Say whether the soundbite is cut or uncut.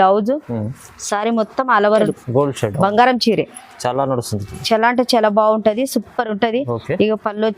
cut